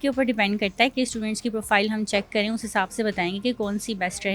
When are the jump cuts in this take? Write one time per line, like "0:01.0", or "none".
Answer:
none